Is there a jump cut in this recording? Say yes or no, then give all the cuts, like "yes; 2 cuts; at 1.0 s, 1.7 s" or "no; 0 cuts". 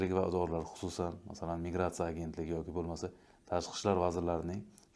no; 0 cuts